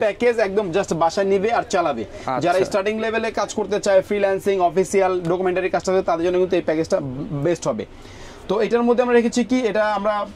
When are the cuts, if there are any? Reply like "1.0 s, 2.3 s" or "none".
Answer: none